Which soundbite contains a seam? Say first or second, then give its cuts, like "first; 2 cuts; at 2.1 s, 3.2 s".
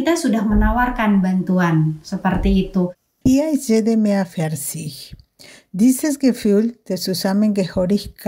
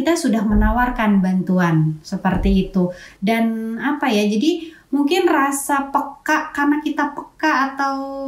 first; 1 cut; at 3.0 s